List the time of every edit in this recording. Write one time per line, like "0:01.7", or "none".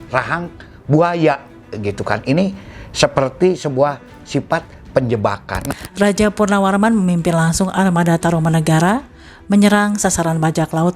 0:05.7